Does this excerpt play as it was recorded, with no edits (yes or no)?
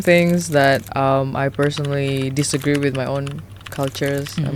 yes